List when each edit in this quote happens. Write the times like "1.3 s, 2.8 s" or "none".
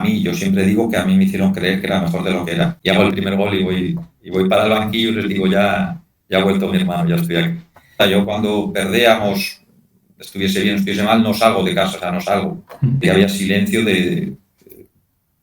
2.8 s, 8.0 s, 13.0 s